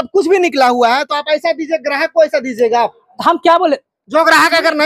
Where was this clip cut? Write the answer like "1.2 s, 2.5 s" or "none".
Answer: none